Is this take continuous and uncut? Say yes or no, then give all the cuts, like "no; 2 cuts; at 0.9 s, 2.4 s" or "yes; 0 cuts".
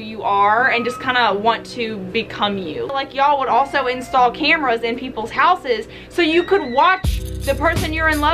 no; 1 cut; at 2.9 s